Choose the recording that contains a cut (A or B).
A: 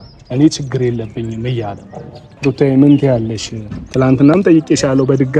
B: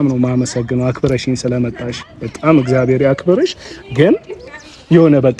A